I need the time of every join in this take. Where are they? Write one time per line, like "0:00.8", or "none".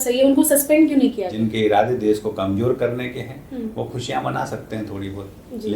0:01.3